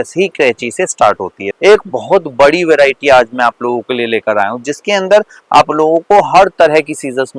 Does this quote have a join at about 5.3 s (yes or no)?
no